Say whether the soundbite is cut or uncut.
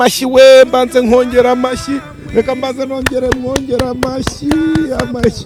uncut